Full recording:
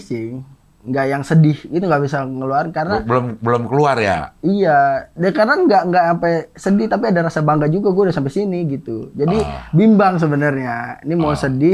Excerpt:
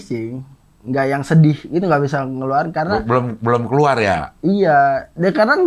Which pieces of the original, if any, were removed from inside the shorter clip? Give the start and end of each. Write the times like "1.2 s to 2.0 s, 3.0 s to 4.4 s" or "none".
none